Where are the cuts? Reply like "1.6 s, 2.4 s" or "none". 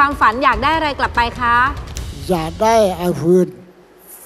none

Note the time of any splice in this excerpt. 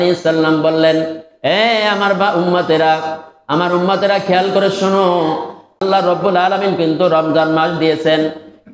5.8 s

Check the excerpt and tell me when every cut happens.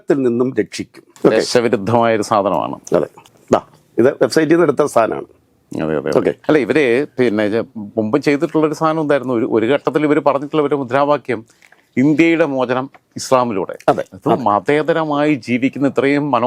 none

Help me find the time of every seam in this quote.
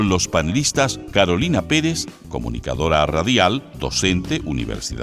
none

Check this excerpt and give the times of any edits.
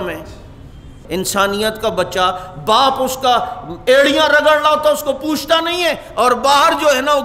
1.0 s

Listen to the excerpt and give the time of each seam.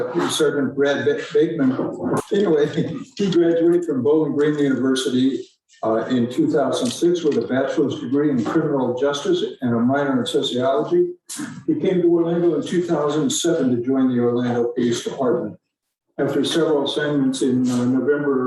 2.2 s

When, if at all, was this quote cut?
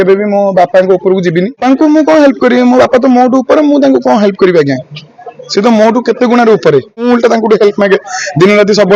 1.6 s, 7.0 s

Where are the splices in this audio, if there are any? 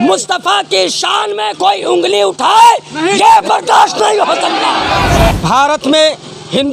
5.4 s

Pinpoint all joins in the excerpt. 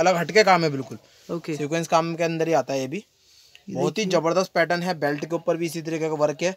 none

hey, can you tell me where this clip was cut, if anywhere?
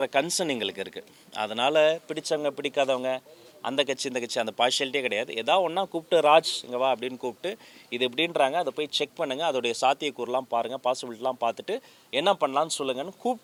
none

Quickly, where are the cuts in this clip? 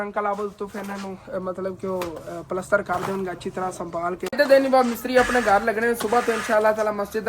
4.3 s

